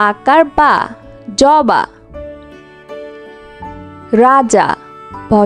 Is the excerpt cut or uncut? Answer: cut